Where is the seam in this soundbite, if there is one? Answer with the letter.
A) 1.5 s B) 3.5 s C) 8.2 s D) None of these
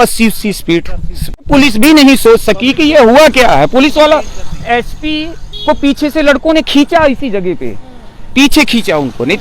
A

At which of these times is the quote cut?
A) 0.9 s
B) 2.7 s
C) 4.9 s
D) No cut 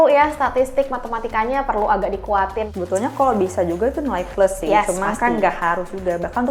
B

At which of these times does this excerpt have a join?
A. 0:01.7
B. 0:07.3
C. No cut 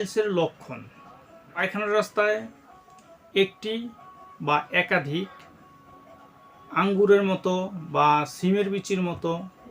A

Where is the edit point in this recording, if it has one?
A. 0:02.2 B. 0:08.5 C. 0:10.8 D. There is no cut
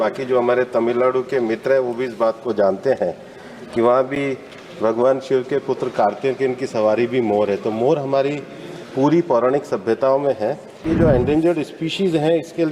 C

